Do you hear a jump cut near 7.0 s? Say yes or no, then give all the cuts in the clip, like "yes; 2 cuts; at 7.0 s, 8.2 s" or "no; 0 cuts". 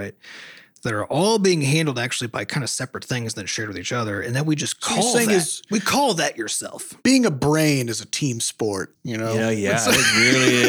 yes; 2 cuts; at 7.0 s, 9.0 s